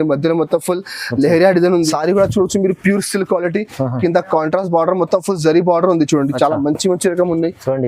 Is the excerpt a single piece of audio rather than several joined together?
no; 1 cut; at 1.9 s

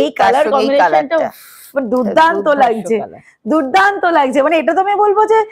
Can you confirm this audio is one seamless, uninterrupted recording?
yes; 0 cuts

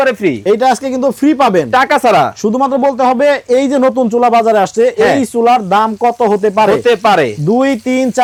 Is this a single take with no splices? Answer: yes; 0 cuts

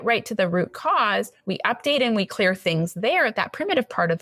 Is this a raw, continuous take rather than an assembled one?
yes; 0 cuts

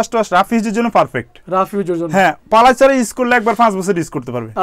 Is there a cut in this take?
no; 0 cuts

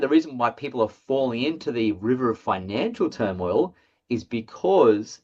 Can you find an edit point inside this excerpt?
no; 0 cuts

